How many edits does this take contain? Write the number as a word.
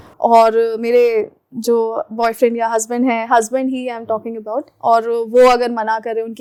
zero